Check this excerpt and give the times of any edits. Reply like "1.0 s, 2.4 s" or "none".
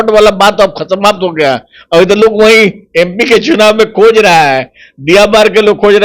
none